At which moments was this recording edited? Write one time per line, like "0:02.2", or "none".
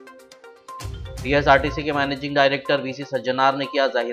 0:01.2